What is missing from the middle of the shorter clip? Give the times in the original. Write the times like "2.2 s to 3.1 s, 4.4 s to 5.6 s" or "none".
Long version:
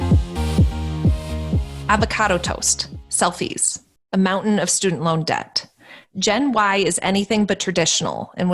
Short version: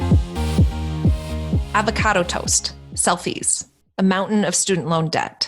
1.7 s to 1.8 s